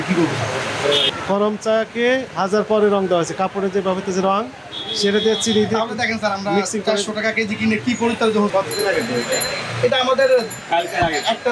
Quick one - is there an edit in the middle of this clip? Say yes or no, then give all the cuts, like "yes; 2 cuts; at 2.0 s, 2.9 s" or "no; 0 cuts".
yes; 2 cuts; at 1.1 s, 8.5 s